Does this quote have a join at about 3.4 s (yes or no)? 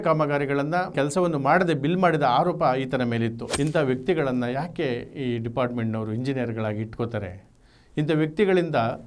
yes